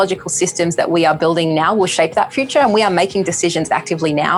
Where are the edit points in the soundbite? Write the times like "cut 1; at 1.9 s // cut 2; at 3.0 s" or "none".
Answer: none